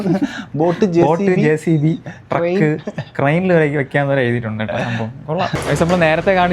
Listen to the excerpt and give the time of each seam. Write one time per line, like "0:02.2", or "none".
0:05.6